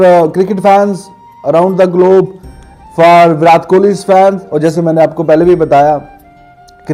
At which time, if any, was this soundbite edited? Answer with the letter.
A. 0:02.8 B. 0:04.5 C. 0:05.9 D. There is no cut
D